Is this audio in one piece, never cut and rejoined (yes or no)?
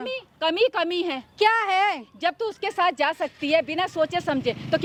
yes